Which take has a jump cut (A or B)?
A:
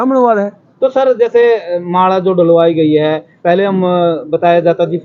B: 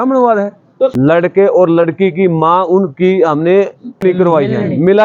B